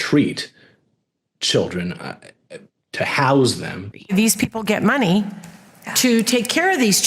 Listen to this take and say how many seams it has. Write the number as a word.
one